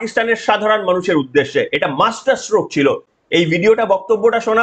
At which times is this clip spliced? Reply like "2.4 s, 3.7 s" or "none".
none